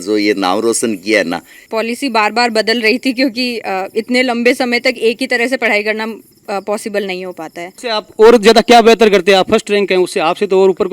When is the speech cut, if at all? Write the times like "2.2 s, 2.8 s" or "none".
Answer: 1.6 s, 7.7 s